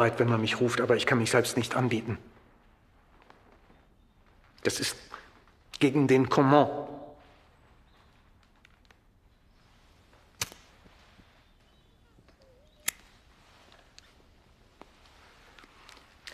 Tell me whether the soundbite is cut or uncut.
uncut